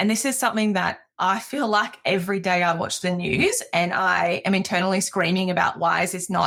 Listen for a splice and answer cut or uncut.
uncut